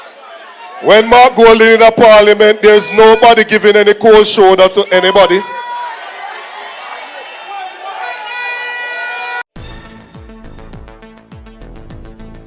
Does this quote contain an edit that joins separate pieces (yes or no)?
no